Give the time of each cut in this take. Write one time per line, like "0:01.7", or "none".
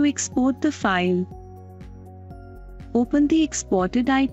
0:01.4
0:02.9